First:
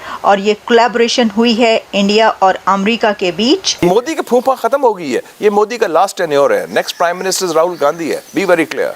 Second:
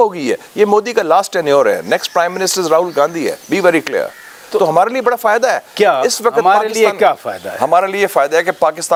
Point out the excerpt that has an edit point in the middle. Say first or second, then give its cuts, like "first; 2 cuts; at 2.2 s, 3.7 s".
first; 1 cut; at 3.8 s